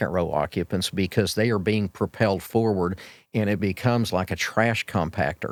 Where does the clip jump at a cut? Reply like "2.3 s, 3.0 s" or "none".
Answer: none